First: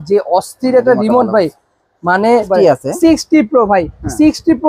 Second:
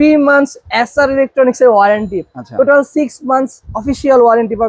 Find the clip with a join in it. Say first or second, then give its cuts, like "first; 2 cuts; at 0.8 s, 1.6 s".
first; 1 cut; at 2.5 s